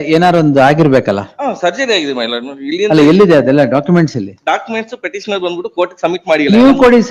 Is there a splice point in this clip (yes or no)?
no